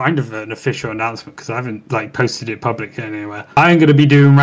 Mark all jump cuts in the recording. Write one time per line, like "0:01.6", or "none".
none